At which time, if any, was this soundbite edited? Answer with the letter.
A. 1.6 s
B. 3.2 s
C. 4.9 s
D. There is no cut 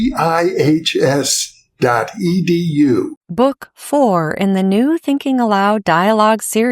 B